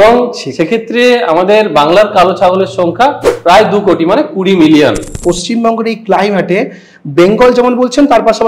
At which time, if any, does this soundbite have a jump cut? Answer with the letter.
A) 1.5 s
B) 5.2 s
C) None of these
B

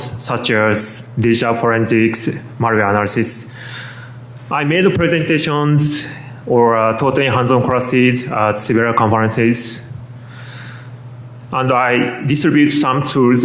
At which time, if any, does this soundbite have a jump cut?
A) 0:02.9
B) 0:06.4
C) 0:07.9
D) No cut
C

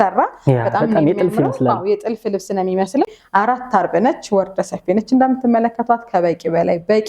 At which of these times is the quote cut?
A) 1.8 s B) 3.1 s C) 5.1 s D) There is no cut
B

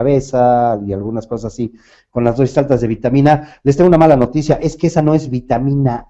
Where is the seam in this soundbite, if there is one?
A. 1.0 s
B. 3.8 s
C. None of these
A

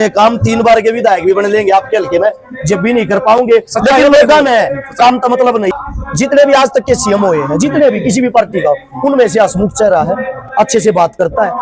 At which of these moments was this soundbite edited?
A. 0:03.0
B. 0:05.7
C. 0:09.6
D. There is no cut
B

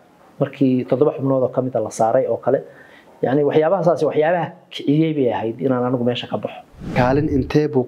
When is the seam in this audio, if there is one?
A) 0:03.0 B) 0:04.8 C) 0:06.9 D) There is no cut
C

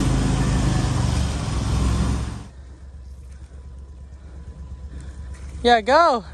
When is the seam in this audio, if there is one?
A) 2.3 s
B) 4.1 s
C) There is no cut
A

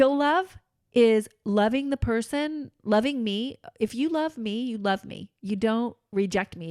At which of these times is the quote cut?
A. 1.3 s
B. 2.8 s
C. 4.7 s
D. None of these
D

